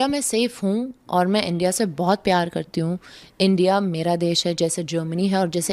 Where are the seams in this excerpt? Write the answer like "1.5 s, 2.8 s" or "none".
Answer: none